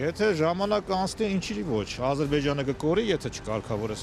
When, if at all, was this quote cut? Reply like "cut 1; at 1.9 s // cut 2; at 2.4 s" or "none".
none

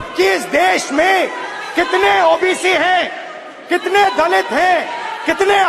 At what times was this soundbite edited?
none

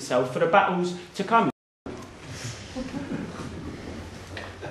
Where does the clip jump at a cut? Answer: none

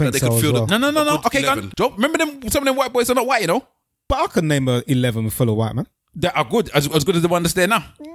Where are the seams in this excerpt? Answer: cut 1; at 1.7 s // cut 2; at 4.0 s

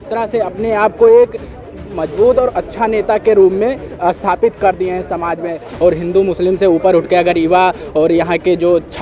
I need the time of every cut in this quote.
cut 1; at 5.7 s

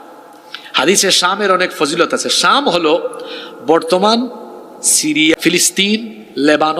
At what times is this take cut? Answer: cut 1; at 5.4 s

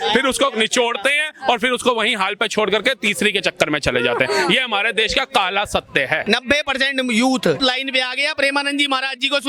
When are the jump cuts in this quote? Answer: cut 1; at 6.2 s // cut 2; at 7.6 s

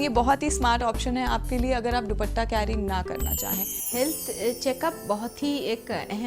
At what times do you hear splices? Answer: cut 1; at 3.8 s

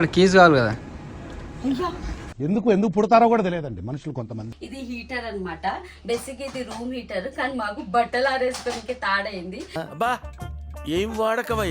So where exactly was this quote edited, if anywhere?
cut 1; at 4.5 s

